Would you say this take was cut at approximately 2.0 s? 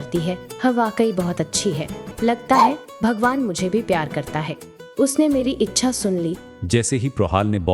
yes; 1 cut; at 2.0 s

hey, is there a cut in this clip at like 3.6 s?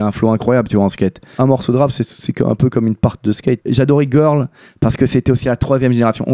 yes; 3 cuts; at 1.4 s, 3.6 s, 5.4 s

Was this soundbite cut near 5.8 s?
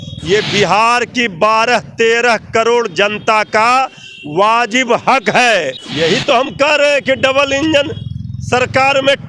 yes; 1 cut; at 5.8 s

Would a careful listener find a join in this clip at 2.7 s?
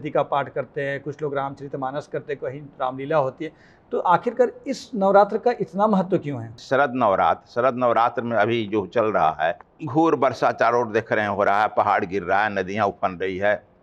no; 2 cuts; at 6.6 s, 9.7 s

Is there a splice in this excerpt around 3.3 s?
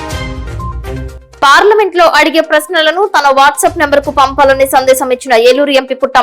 no; 1 cut; at 1.2 s

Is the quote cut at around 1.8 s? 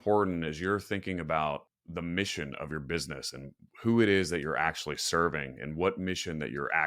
yes; 1 cut; at 1.8 s

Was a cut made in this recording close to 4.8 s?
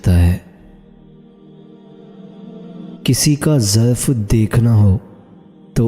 no; 2 cuts; at 0.9 s, 3.0 s

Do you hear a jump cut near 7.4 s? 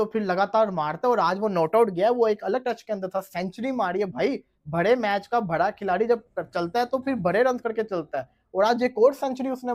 no; 0 cuts

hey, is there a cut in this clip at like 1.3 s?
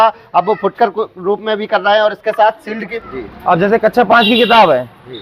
no; 1 cut; at 2.9 s

